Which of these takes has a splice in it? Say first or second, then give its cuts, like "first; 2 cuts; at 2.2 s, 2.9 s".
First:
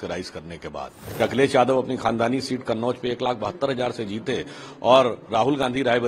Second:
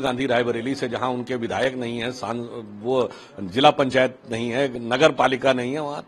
first; 1 cut; at 1.0 s